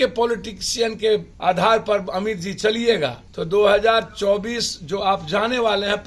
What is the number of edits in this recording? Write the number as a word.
two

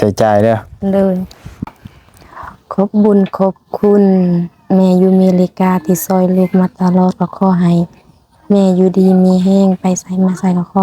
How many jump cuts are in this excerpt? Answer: one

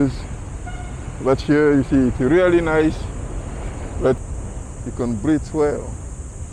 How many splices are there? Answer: one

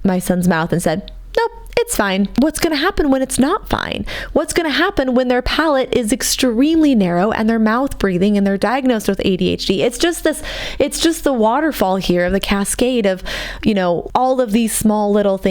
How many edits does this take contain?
two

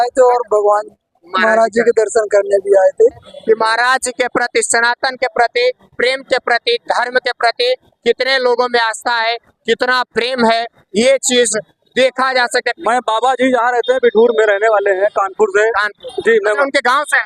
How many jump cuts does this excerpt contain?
two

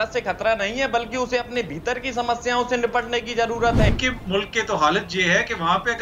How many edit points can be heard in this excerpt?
one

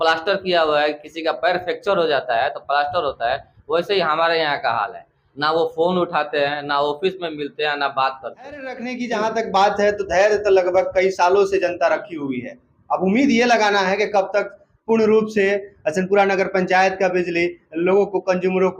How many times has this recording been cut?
one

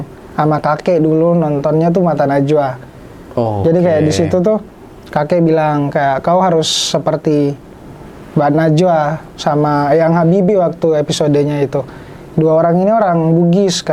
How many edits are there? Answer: zero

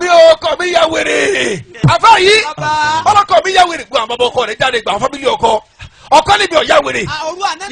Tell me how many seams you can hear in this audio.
one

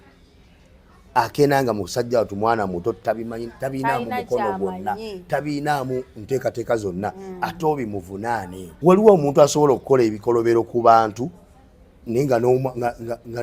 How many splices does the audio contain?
one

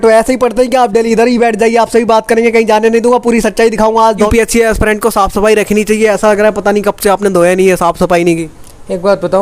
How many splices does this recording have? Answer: one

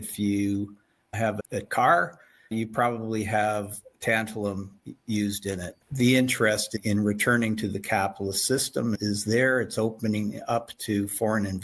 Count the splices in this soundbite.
two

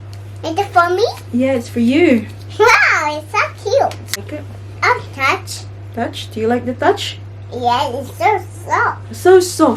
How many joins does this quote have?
one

